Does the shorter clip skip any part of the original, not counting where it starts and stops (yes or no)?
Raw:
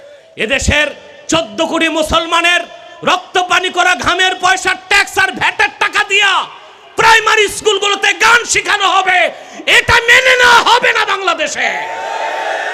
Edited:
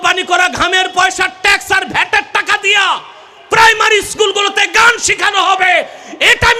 no